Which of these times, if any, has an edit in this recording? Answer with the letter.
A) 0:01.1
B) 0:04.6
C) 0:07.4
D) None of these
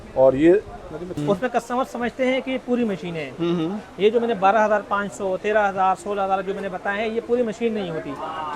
A